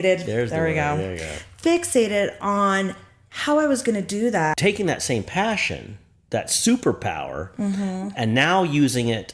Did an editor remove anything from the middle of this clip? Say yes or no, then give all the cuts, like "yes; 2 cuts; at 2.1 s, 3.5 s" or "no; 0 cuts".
yes; 1 cut; at 4.6 s